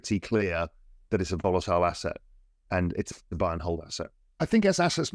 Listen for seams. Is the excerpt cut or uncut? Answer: uncut